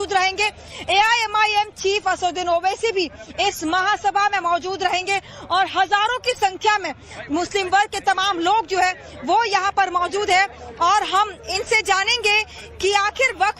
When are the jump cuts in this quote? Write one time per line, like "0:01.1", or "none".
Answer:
0:05.3